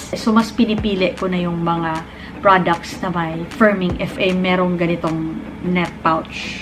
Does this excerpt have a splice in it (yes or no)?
yes